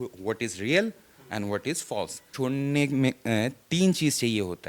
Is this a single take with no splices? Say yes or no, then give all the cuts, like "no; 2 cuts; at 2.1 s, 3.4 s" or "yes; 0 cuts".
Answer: no; 1 cut; at 2.3 s